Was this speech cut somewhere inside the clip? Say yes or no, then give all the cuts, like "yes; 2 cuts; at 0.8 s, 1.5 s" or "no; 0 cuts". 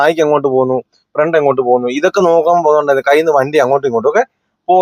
no; 0 cuts